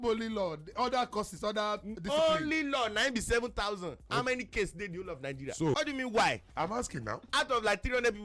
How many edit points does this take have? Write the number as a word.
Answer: one